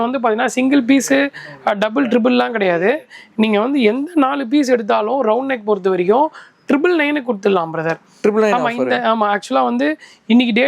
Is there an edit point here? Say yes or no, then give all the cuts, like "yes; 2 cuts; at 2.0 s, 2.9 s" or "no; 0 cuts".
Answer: no; 0 cuts